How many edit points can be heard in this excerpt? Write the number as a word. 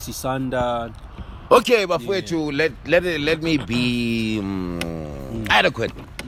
zero